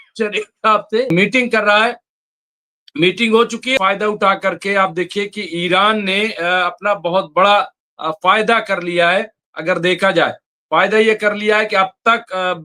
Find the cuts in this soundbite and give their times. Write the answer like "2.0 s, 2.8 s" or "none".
1.1 s, 3.8 s